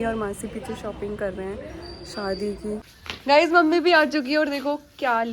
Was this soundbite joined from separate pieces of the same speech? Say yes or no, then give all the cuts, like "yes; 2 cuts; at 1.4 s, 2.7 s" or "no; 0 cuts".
yes; 1 cut; at 2.9 s